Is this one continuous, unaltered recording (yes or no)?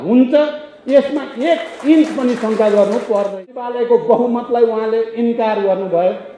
no